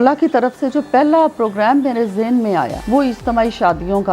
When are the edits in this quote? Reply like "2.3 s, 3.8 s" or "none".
2.8 s